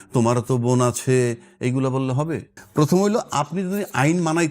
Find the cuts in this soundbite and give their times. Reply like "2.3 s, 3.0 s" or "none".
2.6 s